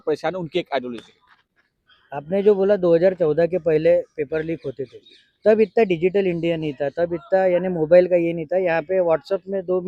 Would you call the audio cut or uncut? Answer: uncut